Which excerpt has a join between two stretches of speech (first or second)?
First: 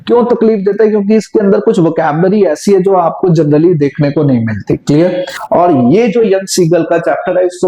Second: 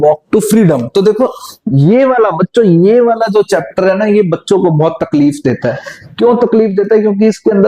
first